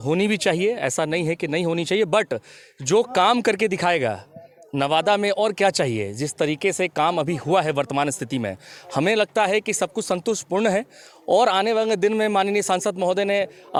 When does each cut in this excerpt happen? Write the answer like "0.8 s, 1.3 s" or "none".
none